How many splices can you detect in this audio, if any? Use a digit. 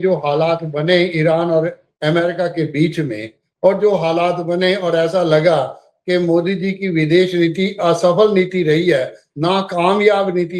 0